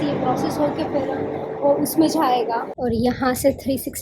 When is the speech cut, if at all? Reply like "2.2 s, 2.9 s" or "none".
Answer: 2.7 s